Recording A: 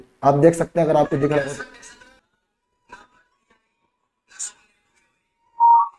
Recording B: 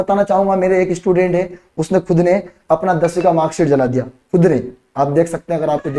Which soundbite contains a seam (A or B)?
A